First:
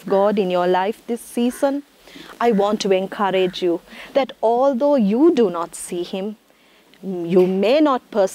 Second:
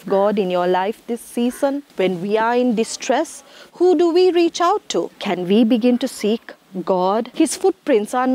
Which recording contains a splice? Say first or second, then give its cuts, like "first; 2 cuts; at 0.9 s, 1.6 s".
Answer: second; 3 cuts; at 1.9 s, 5.2 s, 7.3 s